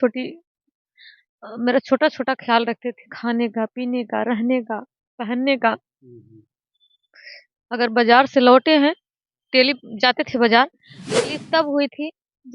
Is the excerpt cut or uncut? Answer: cut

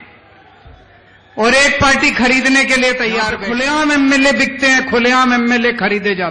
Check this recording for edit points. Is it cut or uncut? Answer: cut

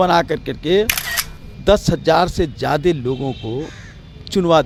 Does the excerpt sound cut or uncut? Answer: uncut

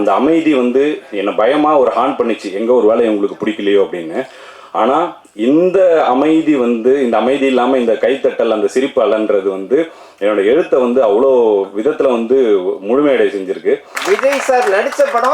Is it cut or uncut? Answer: cut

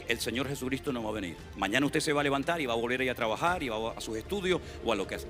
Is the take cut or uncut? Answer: cut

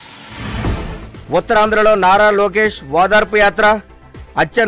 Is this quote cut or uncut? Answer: uncut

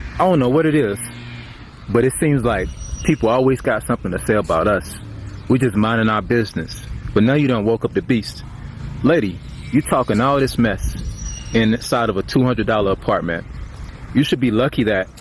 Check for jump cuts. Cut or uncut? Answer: uncut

